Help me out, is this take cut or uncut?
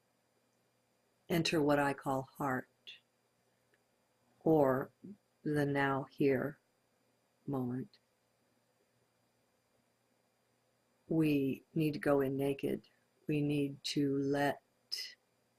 cut